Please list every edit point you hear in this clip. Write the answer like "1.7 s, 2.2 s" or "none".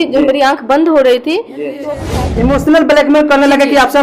1.8 s